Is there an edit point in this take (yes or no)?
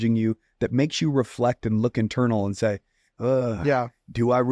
no